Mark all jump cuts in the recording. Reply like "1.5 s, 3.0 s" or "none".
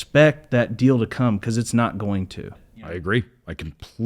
2.7 s